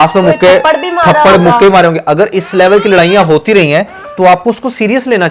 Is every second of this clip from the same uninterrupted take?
yes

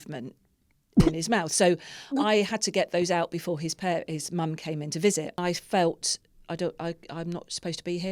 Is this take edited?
yes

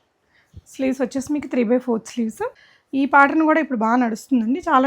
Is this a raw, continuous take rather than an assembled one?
no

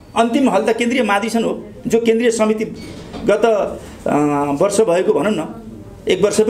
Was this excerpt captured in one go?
yes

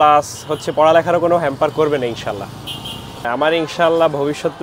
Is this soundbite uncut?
no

